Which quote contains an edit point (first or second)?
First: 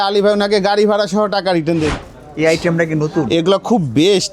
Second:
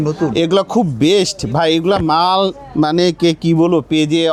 first